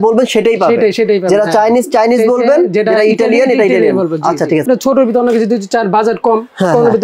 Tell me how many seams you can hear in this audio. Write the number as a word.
one